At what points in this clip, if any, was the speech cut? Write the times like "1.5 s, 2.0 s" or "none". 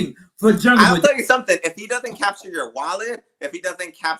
0.9 s